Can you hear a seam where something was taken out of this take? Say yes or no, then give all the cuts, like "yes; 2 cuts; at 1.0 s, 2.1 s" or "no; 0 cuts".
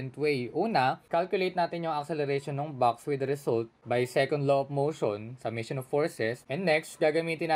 yes; 3 cuts; at 1.0 s, 3.8 s, 6.4 s